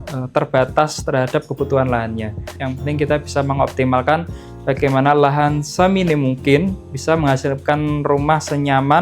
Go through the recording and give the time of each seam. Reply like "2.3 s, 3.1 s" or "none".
2.5 s